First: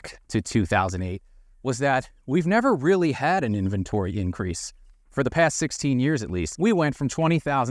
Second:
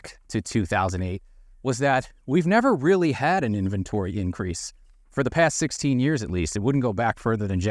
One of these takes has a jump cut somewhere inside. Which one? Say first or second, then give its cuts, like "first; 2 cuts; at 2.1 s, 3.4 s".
first; 1 cut; at 6.5 s